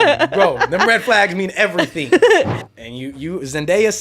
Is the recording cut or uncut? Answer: cut